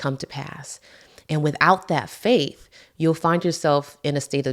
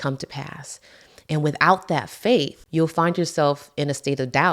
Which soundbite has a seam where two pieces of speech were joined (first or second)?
second